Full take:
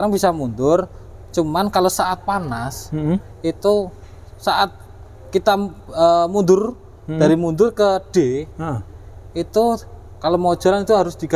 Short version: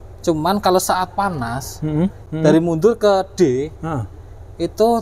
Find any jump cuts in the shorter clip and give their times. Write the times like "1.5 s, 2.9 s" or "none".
2.2 s